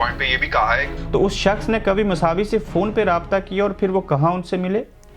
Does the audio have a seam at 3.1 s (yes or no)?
no